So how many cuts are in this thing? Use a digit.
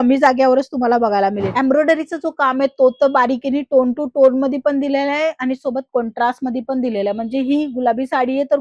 1